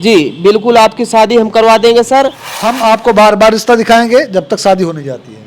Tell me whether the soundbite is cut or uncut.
cut